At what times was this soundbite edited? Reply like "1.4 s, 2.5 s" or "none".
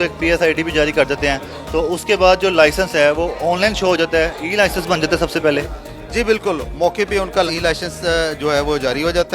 none